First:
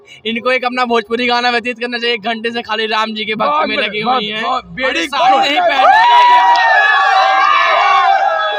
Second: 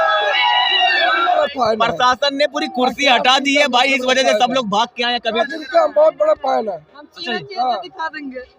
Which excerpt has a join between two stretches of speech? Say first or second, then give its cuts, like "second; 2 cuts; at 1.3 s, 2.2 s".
second; 2 cuts; at 1.4 s, 5.4 s